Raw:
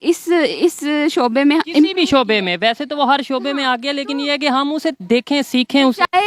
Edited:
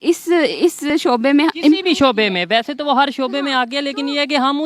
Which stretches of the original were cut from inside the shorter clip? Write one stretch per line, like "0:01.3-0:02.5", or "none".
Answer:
0:00.9-0:01.0